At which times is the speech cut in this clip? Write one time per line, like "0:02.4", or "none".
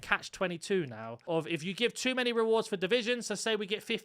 0:01.1